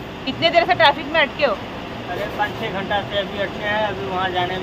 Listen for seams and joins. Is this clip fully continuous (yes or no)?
yes